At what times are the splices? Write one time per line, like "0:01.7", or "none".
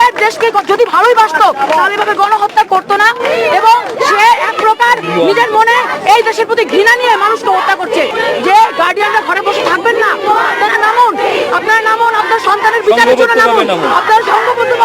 0:08.1